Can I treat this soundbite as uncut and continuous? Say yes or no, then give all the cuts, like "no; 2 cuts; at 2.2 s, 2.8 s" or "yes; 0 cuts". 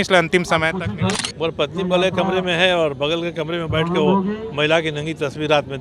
no; 1 cut; at 1.1 s